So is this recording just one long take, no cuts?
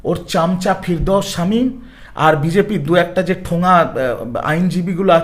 yes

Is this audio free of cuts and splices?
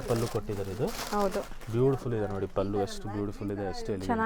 yes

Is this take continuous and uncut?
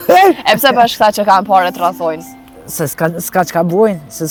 yes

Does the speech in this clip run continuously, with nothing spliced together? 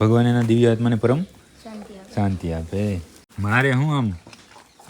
no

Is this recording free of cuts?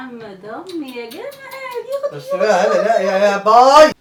yes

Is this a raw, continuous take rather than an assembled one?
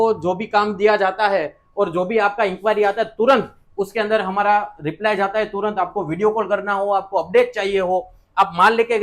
yes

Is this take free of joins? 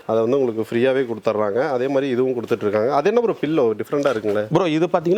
yes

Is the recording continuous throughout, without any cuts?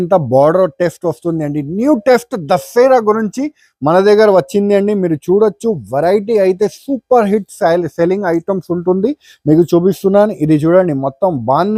yes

